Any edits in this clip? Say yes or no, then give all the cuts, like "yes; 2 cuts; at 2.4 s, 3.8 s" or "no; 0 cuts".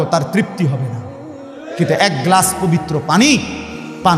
no; 0 cuts